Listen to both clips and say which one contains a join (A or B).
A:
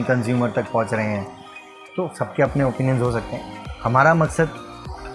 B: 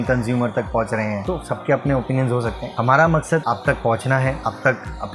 B